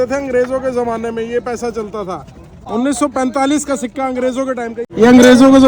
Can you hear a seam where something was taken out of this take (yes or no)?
yes